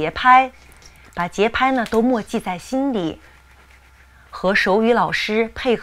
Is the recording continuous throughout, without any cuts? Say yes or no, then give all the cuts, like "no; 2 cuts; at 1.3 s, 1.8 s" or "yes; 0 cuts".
yes; 0 cuts